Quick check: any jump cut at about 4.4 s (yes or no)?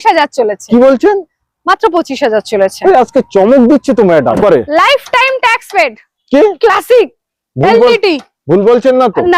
yes